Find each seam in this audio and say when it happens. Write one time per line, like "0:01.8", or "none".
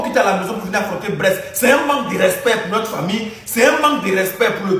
none